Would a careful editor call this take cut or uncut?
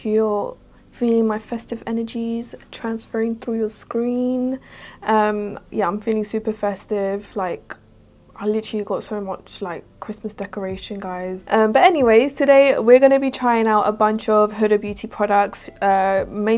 uncut